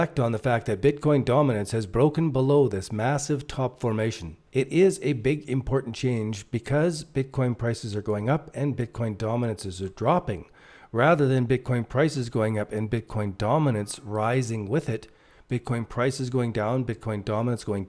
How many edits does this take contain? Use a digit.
1